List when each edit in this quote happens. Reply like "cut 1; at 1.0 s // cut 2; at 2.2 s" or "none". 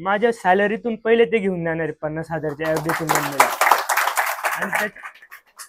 none